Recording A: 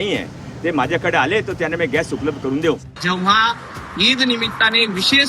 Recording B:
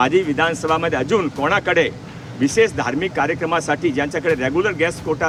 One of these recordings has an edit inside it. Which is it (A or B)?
A